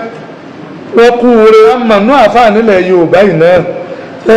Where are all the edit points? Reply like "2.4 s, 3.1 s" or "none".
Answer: 1.8 s